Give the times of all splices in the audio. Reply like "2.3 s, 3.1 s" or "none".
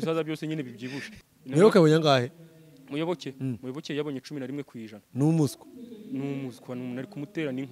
1.0 s